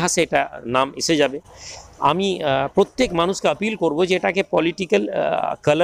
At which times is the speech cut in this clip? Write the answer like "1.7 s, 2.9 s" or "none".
none